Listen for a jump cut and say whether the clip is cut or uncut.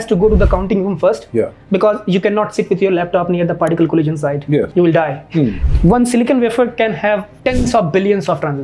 cut